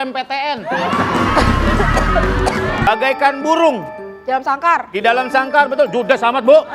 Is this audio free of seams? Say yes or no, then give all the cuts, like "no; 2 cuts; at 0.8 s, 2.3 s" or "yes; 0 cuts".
no; 1 cut; at 2.8 s